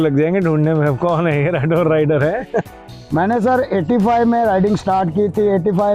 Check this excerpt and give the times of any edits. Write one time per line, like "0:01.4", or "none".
0:02.7